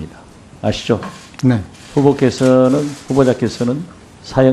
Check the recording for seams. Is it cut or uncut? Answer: cut